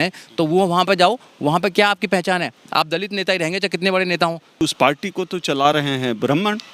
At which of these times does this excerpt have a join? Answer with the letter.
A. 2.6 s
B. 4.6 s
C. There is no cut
B